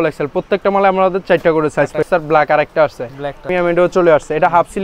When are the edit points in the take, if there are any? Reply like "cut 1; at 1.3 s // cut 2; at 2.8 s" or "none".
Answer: cut 1; at 2.0 s // cut 2; at 3.5 s